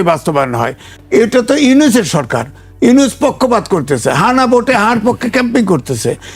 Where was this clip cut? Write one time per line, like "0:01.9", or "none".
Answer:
0:01.0